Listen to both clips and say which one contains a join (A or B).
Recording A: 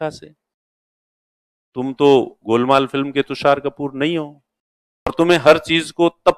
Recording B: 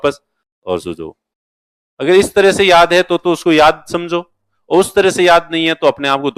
A